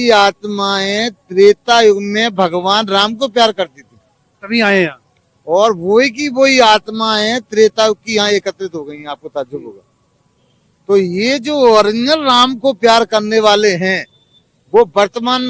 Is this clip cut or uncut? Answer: uncut